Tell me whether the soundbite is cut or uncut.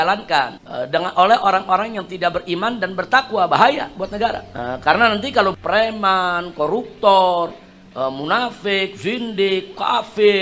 uncut